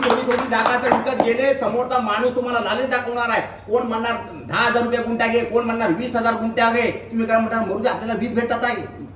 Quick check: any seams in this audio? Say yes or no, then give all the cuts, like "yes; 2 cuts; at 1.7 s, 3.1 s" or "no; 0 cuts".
no; 0 cuts